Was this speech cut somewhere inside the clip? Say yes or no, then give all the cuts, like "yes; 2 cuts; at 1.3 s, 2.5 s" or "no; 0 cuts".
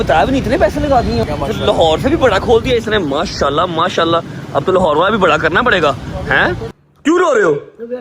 yes; 2 cuts; at 1.2 s, 6.8 s